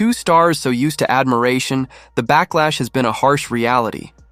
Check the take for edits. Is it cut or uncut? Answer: uncut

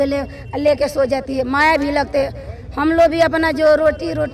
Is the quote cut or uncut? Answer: uncut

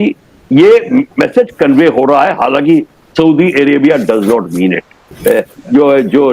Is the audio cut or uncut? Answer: cut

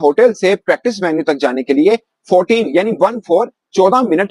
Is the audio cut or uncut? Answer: uncut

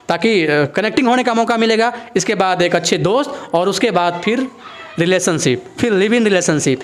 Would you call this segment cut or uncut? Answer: uncut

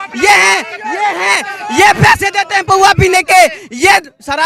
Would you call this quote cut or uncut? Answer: uncut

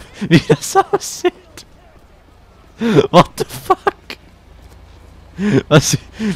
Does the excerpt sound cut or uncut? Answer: uncut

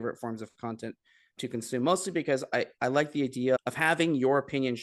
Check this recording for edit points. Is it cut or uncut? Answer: uncut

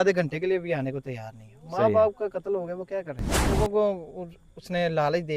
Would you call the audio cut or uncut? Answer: cut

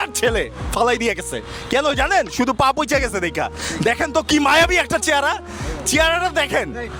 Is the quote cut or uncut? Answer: uncut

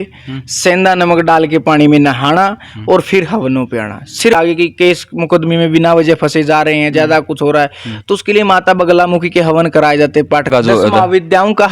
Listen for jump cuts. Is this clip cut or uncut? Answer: cut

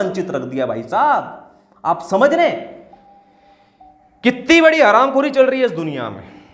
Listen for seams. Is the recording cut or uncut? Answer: uncut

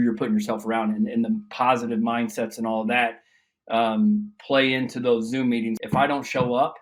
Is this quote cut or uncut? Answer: uncut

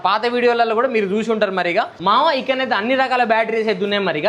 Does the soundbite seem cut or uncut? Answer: cut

